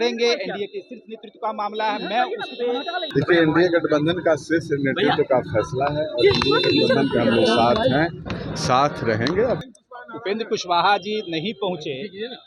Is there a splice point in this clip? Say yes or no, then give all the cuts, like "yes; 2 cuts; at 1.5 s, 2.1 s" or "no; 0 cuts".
yes; 2 cuts; at 3.0 s, 9.6 s